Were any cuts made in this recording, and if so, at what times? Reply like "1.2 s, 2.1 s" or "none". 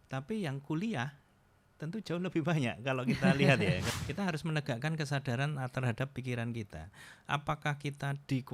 3.9 s